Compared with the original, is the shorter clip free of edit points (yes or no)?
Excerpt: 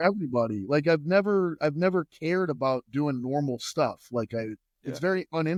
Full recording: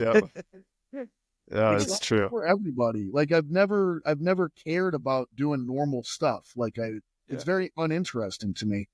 yes